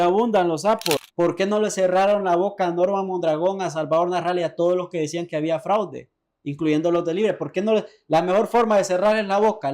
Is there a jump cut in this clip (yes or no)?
yes